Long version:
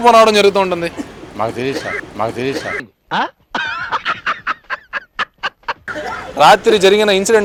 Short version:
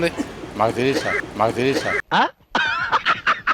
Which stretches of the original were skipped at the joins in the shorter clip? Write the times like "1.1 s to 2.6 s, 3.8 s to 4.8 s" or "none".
2.8 s to 3.0 s